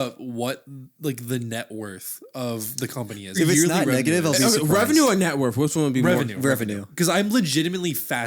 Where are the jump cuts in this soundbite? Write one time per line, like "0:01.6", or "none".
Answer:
0:03.4
0:06.9